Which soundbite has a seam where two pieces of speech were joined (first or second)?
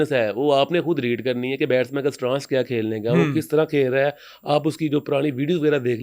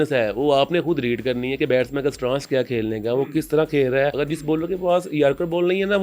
second